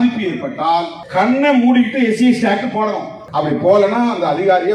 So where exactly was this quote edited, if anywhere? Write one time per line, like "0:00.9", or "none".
0:01.0
0:03.1